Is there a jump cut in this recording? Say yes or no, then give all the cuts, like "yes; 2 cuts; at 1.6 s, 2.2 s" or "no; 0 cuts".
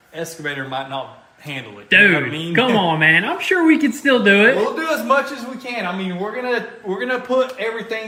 no; 0 cuts